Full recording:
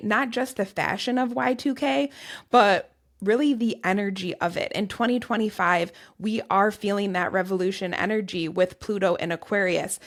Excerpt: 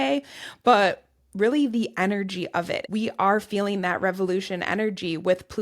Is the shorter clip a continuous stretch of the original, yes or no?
no